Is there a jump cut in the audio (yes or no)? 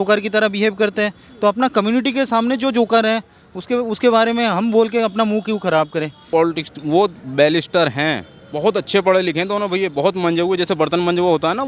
yes